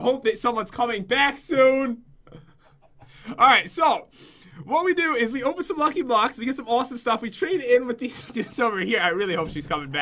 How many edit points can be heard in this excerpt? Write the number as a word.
one